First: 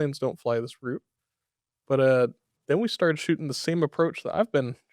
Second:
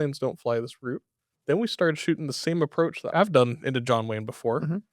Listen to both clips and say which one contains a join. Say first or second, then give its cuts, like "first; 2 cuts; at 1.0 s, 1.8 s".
second; 2 cuts; at 1.3 s, 3.1 s